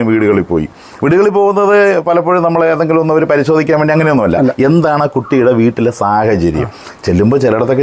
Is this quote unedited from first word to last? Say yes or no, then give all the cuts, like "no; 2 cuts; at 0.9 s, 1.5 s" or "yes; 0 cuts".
yes; 0 cuts